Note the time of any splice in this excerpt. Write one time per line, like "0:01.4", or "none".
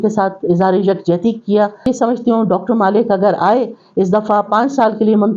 0:01.9